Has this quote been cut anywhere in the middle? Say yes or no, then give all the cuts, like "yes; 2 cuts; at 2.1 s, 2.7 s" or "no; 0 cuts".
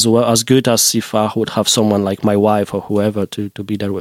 no; 0 cuts